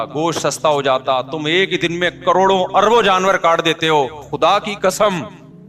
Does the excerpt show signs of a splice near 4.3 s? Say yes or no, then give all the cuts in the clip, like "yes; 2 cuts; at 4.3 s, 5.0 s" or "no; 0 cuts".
yes; 1 cut; at 4.3 s